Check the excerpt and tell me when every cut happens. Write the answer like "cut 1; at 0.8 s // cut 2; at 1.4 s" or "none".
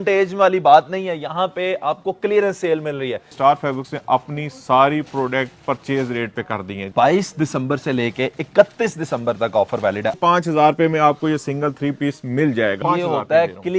cut 1; at 3.3 s // cut 2; at 6.8 s // cut 3; at 10.1 s // cut 4; at 12.8 s